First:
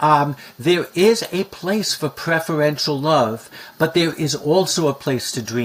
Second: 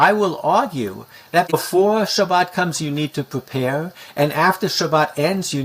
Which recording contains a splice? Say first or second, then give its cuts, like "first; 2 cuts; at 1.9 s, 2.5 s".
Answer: second; 1 cut; at 1.5 s